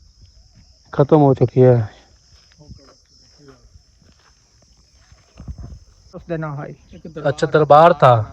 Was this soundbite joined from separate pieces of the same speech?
yes; 1 cut; at 6.2 s

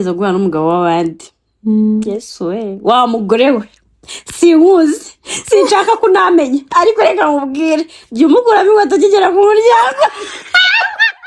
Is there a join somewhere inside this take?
no; 0 cuts

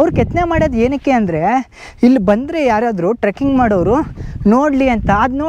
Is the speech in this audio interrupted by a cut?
no; 0 cuts

